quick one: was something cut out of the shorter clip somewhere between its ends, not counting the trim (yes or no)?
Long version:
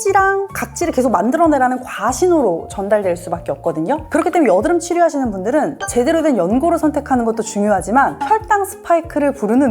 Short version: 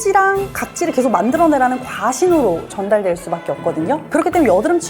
no